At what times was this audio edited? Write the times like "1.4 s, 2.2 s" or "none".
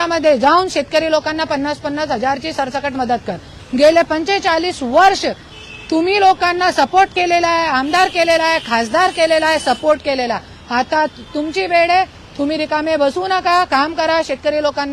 3.6 s